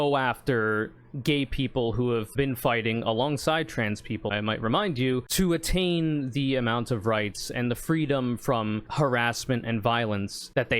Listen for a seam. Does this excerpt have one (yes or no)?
no